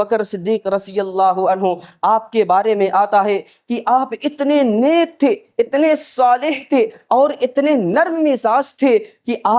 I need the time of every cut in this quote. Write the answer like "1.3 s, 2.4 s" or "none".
none